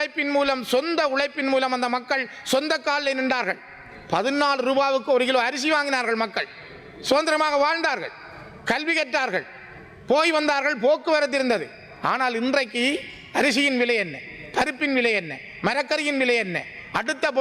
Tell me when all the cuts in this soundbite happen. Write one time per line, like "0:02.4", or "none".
none